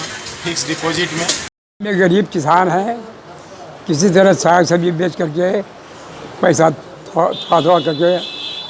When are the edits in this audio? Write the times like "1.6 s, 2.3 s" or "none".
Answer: 1.6 s